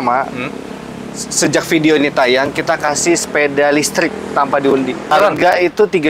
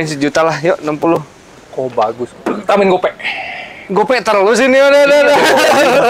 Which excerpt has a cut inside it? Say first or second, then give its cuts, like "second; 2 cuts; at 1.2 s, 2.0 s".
first; 1 cut; at 5.1 s